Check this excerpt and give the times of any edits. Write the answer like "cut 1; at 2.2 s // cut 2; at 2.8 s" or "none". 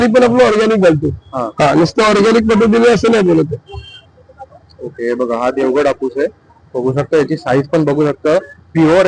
none